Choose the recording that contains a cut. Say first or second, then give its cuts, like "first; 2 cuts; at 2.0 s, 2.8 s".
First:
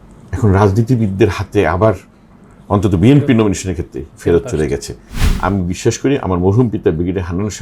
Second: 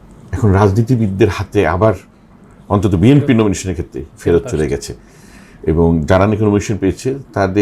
first; 1 cut; at 5.2 s